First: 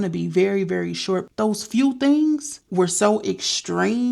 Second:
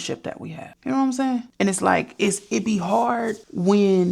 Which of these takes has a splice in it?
first; 1 cut; at 1.3 s

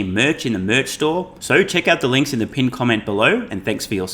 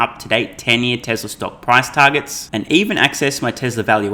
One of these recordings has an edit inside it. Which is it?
first; 1 cut; at 1.4 s

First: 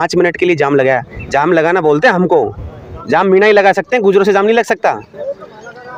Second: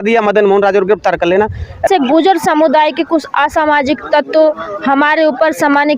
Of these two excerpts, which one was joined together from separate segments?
second; 1 cut; at 1.9 s

